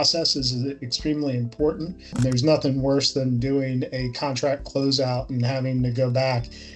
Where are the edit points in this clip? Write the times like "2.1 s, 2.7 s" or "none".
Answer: 2.1 s